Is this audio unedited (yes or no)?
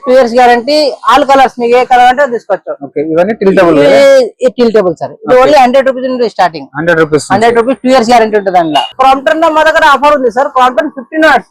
no